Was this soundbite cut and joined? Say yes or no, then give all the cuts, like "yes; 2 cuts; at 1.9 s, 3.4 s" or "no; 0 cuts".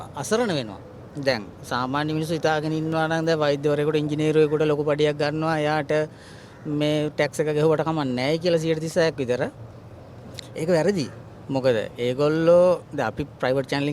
no; 0 cuts